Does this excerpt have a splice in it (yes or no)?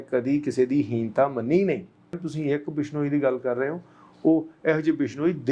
yes